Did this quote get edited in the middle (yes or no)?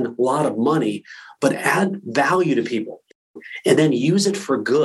yes